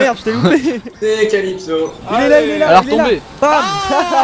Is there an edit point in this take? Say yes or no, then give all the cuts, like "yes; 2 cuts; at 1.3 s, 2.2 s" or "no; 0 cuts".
no; 0 cuts